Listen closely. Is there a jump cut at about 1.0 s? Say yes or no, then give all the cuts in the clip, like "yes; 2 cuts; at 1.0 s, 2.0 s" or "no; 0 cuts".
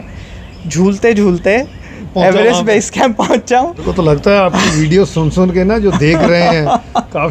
no; 1 cut; at 3.8 s